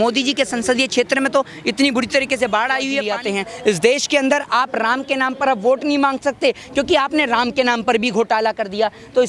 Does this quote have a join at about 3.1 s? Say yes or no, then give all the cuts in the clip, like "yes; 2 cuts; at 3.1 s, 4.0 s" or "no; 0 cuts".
yes; 1 cut; at 3.1 s